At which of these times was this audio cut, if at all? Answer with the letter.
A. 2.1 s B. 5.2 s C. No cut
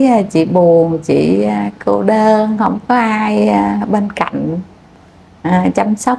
C